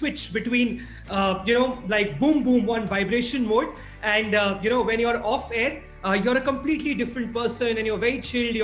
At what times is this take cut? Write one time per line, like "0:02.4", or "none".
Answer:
none